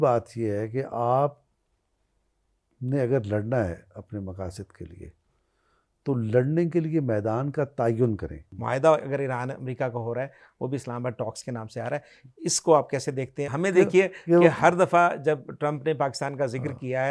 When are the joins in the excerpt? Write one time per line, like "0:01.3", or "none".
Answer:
0:08.1
0:13.5